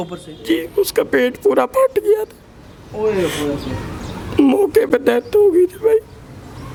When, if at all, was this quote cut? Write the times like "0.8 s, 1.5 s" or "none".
none

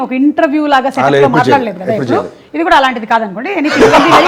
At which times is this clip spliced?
none

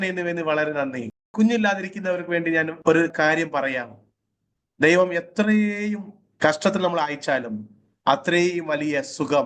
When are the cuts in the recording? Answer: 1.2 s, 3.1 s

